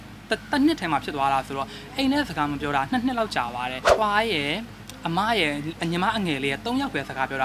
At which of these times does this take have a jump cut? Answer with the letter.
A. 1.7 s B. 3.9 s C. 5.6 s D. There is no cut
B